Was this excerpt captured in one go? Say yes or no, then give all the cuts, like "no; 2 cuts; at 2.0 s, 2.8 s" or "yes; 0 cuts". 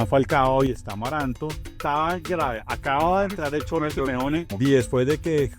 no; 2 cuts; at 1.8 s, 4.5 s